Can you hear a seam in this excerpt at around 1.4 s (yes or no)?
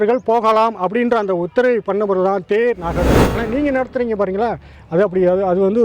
no